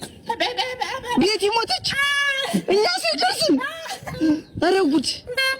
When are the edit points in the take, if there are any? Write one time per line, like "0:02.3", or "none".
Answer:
none